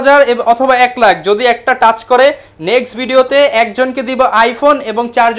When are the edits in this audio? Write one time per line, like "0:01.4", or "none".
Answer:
none